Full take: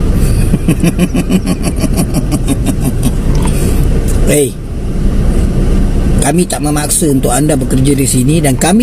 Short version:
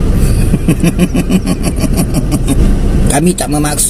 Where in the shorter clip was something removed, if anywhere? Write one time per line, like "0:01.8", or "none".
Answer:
0:02.6